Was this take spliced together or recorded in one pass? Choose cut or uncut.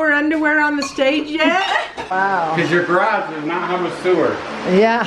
cut